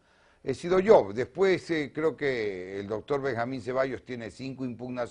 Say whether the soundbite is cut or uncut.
uncut